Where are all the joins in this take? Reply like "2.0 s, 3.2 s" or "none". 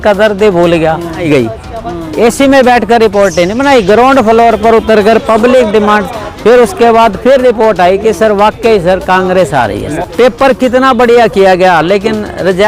1.2 s, 9.9 s